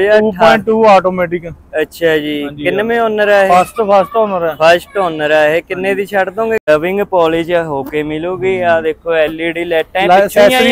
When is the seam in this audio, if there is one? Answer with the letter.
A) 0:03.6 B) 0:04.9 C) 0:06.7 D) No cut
C